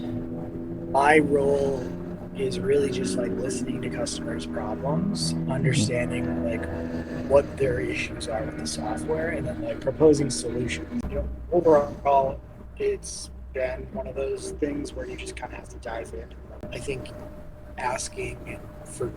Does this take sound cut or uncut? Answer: cut